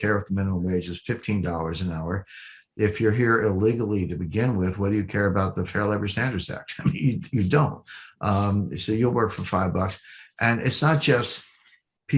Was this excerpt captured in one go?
yes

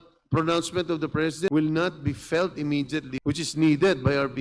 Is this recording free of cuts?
no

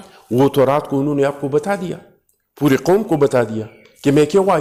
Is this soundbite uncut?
yes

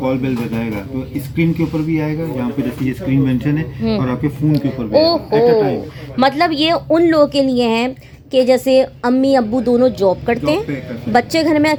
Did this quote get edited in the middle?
no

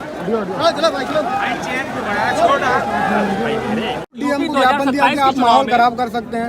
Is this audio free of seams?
no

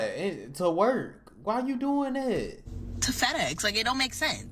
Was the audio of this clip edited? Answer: no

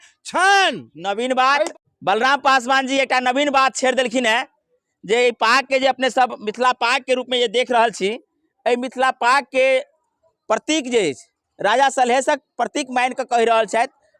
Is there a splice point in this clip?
no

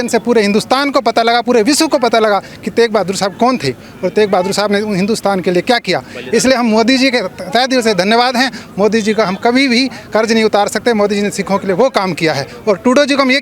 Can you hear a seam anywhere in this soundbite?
no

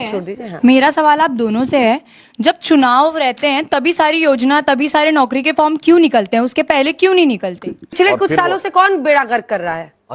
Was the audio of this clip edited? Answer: yes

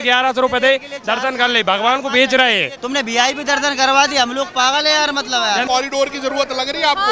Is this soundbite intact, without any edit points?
no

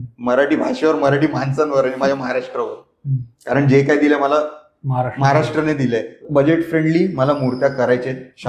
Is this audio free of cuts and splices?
no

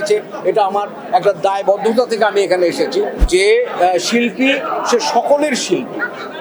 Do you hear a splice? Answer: yes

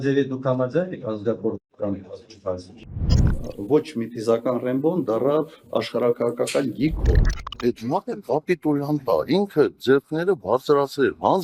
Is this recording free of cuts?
yes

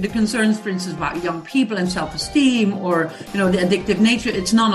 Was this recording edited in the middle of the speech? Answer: no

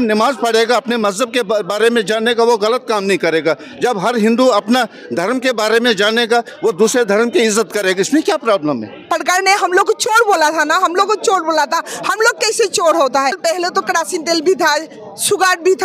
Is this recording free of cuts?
no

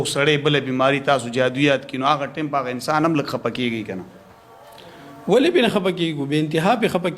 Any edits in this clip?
no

